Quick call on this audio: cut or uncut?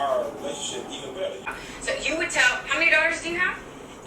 cut